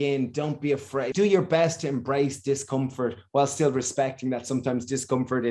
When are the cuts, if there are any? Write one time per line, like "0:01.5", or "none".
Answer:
0:01.1

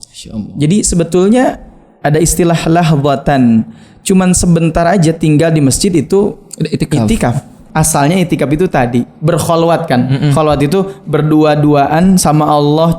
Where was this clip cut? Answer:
0:07.6

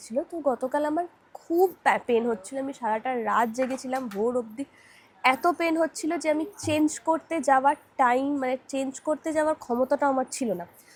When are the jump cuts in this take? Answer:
none

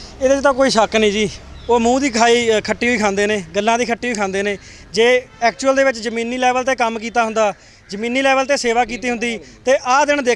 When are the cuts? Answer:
none

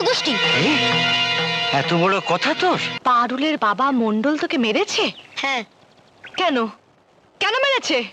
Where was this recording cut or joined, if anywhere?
0:02.9

